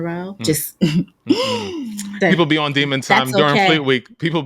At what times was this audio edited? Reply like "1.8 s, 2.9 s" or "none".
2.1 s